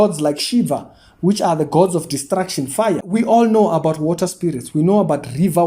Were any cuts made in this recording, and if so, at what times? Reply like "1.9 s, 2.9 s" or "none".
3.0 s